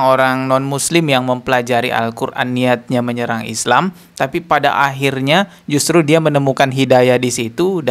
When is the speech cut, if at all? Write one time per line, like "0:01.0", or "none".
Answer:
none